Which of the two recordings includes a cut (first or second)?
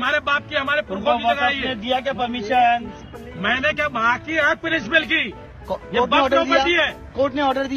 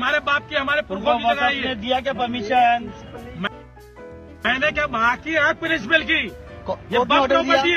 first